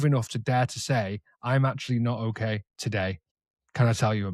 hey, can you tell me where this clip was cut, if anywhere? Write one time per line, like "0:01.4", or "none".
0:03.0